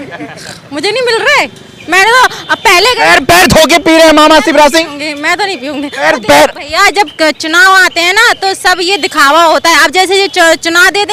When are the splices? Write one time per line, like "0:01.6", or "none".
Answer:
none